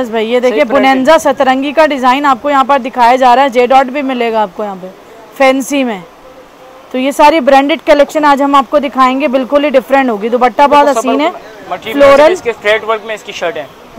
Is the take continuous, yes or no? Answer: yes